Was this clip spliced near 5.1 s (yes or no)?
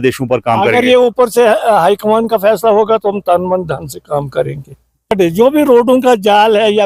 yes